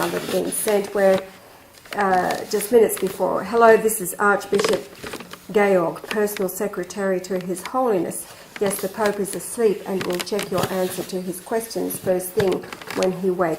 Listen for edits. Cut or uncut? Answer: cut